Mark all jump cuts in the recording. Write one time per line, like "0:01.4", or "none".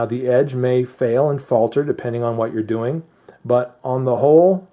0:00.9